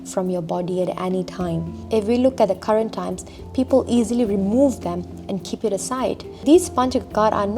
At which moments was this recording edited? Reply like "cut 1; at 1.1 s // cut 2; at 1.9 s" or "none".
cut 1; at 1.7 s // cut 2; at 6.4 s